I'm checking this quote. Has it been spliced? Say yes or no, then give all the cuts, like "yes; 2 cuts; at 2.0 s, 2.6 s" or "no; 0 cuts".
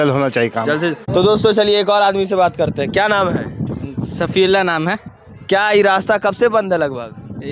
no; 0 cuts